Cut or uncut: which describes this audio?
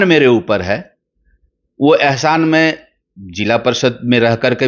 uncut